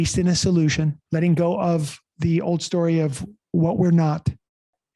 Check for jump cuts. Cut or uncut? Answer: cut